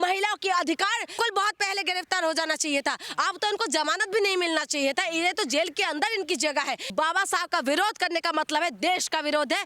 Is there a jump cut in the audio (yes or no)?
yes